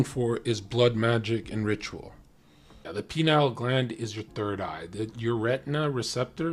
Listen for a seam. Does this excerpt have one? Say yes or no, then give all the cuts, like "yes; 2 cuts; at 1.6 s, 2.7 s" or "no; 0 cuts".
yes; 1 cut; at 2.9 s